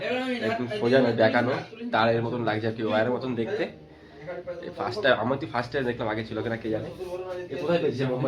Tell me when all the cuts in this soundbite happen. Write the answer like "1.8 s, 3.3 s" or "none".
none